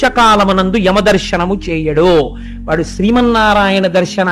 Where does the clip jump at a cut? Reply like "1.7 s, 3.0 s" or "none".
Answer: none